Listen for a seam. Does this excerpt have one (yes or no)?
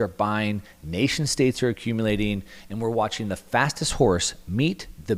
no